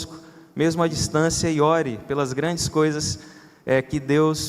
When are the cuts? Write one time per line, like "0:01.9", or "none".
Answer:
none

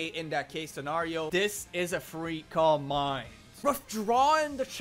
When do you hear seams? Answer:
0:01.3

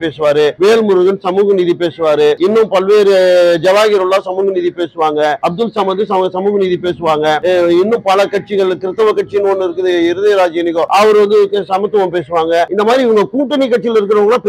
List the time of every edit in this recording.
none

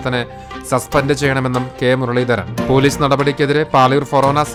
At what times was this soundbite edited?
none

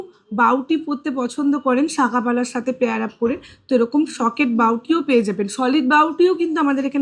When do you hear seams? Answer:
none

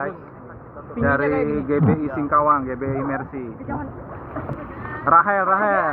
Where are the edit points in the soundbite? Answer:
0:04.5

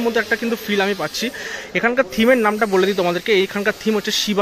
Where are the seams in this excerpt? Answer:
none

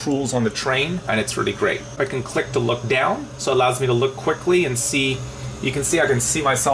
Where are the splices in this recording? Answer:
0:02.0

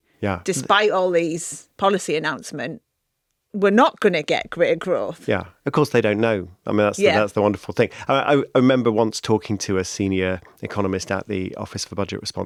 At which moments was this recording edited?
none

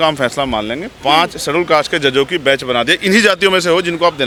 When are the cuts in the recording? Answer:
none

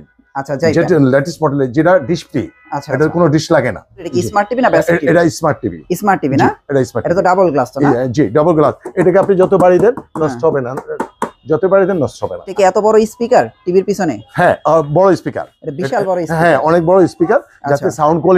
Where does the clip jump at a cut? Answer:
0:04.1
0:12.5

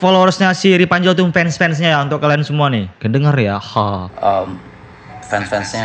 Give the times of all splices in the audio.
none

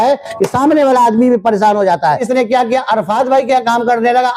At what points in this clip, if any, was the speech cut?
0:02.2

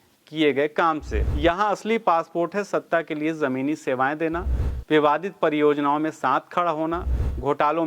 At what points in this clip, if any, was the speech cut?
0:01.1

